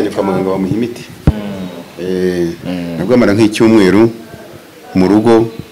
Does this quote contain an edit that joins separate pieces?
yes; 1 cut; at 2.7 s

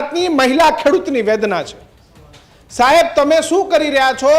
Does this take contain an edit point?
no; 0 cuts

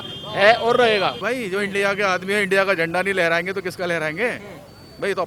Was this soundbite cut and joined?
yes; 1 cut; at 1.2 s

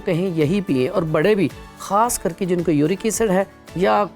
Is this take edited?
no; 0 cuts

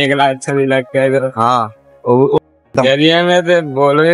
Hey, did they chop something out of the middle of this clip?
yes; 1 cut; at 2.4 s

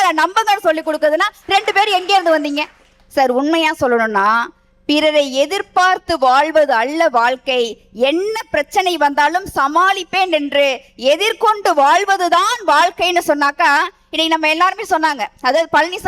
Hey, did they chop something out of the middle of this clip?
no; 0 cuts

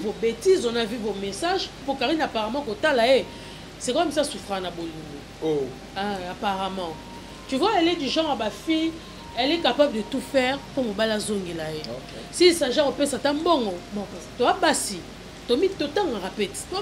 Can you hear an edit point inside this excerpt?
yes; 1 cut; at 1.8 s

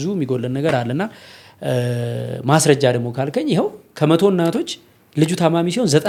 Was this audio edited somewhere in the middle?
no; 0 cuts

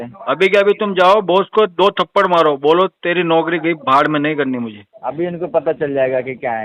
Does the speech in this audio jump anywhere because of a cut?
yes; 1 cut; at 4.9 s

